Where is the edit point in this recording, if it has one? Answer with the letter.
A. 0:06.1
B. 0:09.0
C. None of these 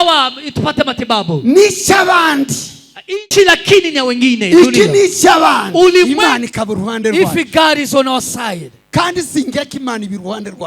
A